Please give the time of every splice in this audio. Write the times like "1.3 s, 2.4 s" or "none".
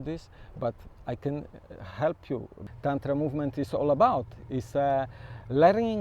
2.6 s